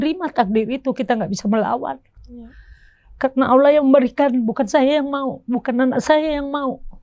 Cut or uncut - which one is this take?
uncut